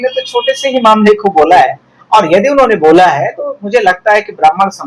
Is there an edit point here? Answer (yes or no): no